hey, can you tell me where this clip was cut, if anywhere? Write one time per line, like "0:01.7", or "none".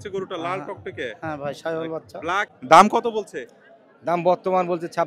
0:02.5